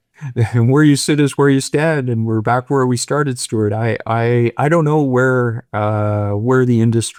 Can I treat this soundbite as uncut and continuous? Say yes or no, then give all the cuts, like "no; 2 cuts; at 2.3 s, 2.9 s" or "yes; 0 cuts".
yes; 0 cuts